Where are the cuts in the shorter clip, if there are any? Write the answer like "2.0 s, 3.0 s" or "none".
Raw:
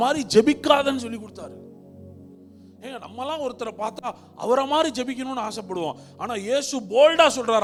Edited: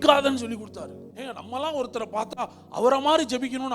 1.0 s